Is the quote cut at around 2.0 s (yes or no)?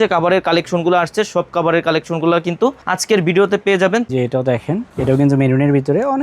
no